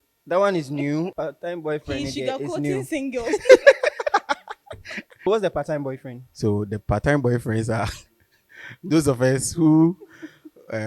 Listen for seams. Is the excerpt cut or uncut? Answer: cut